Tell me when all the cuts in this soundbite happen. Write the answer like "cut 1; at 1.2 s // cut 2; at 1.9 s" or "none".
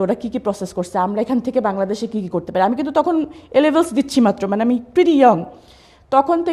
none